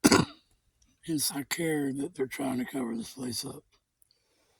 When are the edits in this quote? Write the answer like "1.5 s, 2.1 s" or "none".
1.2 s